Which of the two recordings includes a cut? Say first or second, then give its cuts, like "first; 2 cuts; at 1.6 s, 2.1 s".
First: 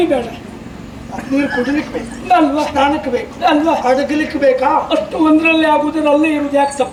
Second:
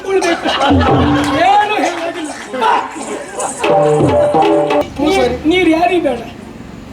second; 1 cut; at 4.8 s